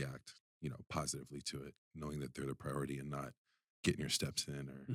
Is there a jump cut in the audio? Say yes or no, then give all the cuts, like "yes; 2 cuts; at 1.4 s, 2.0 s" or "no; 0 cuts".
no; 0 cuts